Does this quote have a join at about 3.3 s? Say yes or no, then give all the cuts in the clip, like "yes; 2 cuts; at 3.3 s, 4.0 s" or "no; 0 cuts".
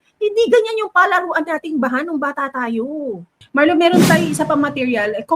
yes; 1 cut; at 3.3 s